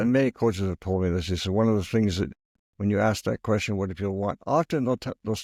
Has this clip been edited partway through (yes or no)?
no